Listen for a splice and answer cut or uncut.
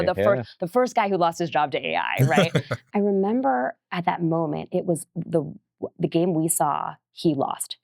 cut